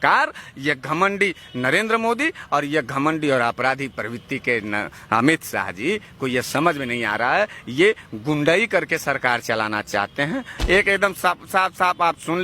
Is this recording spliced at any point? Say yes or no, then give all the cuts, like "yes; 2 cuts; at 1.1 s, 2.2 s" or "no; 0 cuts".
yes; 1 cut; at 10.5 s